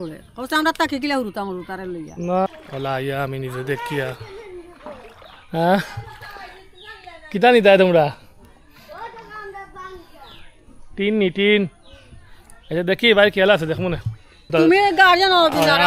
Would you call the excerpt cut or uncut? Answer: cut